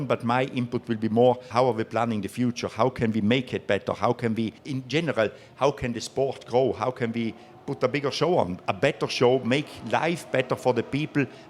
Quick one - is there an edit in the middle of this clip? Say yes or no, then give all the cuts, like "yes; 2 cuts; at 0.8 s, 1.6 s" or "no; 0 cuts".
yes; 2 cuts; at 1.5 s, 4.6 s